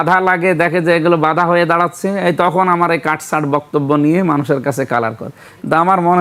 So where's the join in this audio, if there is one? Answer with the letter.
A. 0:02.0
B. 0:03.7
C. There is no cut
C